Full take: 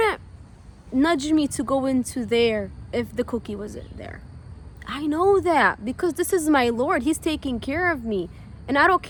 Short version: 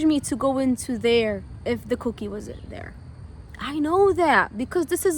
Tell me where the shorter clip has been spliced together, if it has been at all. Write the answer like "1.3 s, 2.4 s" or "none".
none